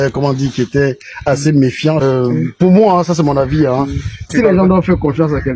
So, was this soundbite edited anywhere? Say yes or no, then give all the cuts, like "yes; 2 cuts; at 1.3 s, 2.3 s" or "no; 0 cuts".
yes; 2 cuts; at 2.0 s, 4.3 s